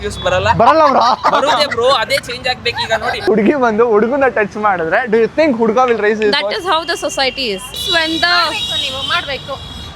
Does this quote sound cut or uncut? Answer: cut